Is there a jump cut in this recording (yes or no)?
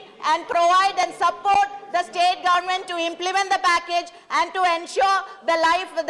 no